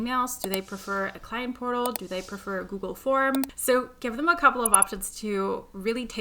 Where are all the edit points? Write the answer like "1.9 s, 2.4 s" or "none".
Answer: 3.6 s